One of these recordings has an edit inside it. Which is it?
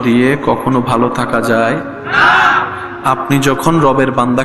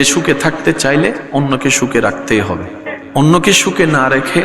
second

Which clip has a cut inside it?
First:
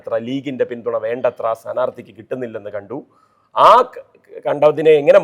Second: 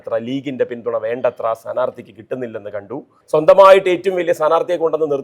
second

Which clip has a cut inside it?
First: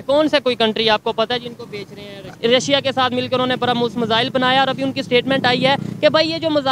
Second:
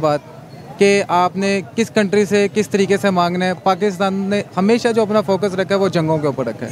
first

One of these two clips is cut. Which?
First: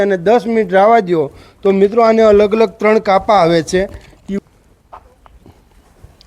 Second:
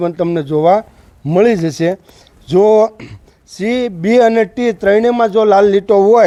first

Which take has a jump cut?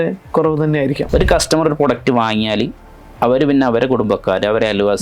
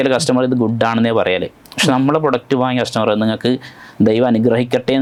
first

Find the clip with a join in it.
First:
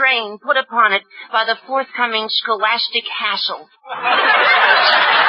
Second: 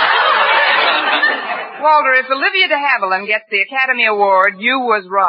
first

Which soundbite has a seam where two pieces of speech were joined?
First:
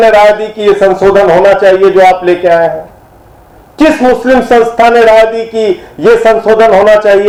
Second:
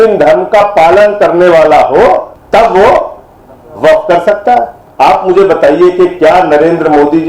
second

